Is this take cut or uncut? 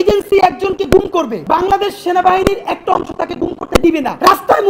uncut